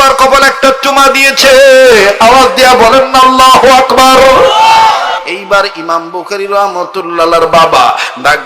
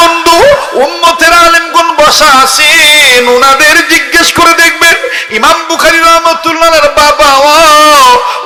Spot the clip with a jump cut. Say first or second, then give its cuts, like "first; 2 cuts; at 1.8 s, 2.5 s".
first; 1 cut; at 5.2 s